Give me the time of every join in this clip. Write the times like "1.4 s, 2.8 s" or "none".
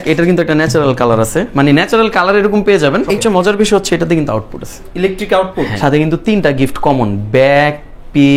3.2 s, 5.7 s